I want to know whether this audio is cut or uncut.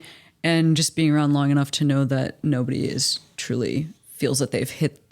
cut